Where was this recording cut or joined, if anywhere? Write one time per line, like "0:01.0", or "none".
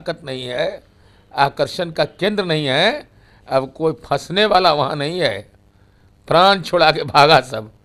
none